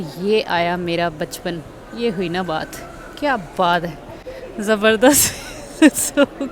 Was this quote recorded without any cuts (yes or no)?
yes